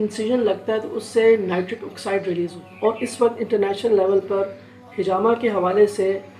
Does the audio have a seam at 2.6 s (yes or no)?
yes